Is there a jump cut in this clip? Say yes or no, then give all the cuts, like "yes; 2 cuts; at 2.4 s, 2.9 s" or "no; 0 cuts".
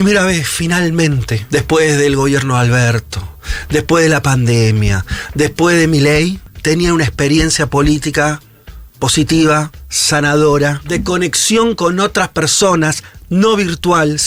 yes; 3 cuts; at 1.3 s, 6.5 s, 10.8 s